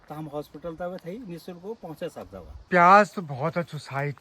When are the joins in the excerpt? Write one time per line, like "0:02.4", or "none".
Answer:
0:02.7